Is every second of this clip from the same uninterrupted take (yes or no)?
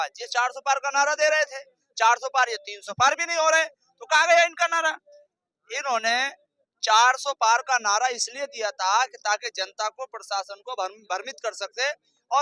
yes